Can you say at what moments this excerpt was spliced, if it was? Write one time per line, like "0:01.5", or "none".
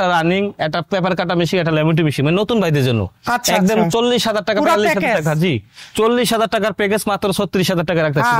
none